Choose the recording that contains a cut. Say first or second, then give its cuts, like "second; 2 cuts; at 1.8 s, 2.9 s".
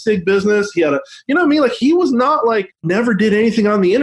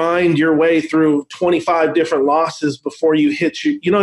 first; 2 cuts; at 1.8 s, 2.9 s